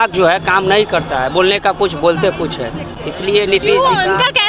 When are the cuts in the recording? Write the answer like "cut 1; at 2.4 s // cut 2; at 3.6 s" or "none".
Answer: none